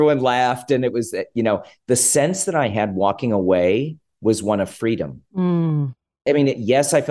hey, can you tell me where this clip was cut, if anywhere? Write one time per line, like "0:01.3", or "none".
0:04.0
0:06.2